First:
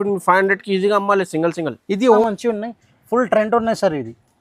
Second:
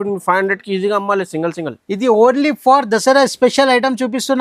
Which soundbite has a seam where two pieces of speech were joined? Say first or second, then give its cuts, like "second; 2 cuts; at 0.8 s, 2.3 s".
first; 1 cut; at 2.2 s